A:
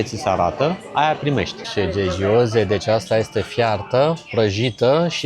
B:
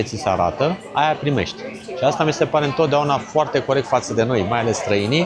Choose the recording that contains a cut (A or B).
A